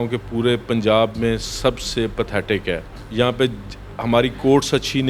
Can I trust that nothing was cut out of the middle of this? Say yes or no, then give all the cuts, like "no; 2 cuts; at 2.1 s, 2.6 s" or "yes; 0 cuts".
no; 1 cut; at 3.0 s